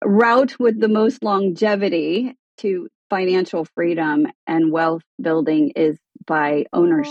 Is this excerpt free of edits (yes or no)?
no